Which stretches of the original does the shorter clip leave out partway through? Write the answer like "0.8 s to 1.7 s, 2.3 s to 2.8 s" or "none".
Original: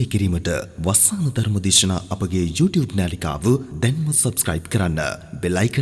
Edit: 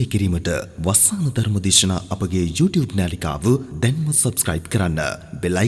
none